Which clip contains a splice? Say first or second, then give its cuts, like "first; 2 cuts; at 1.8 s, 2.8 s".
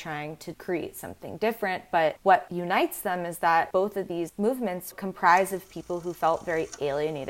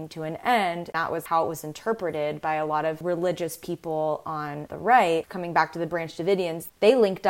second; 2 cuts; at 1.1 s, 5.3 s